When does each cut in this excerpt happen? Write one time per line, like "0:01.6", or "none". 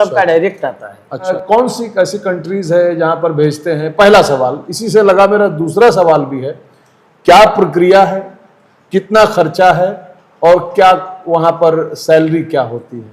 0:01.3